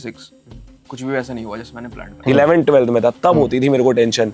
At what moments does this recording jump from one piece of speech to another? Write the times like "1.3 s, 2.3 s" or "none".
2.2 s